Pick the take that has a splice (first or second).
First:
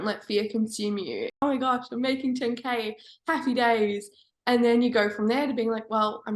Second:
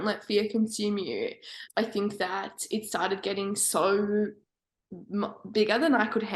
first